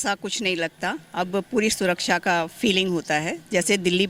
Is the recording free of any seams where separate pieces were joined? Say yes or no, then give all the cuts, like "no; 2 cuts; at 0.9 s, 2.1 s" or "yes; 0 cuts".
yes; 0 cuts